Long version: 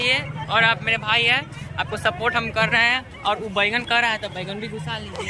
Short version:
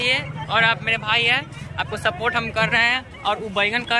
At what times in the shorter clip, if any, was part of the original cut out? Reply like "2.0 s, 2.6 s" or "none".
none